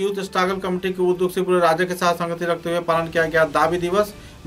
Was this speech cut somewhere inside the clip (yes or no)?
no